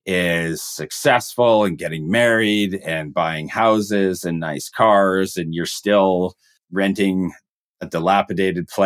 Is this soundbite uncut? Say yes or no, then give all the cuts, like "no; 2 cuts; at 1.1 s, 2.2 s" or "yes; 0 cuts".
no; 1 cut; at 6.6 s